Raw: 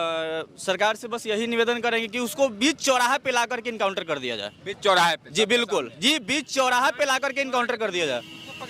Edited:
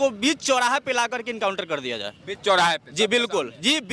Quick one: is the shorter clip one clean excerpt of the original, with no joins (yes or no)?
yes